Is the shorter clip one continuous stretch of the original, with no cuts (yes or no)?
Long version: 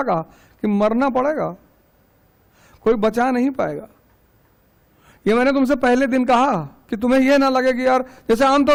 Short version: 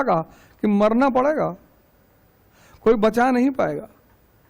yes